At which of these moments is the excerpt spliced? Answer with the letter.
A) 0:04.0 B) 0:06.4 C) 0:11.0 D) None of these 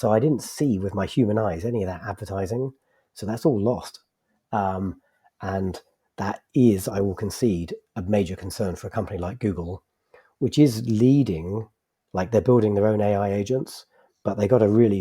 D